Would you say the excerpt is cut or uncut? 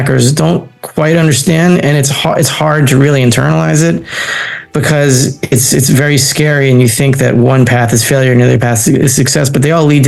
uncut